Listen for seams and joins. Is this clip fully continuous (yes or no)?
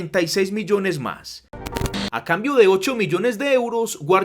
no